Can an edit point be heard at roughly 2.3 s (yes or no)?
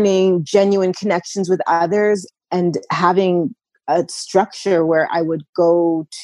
yes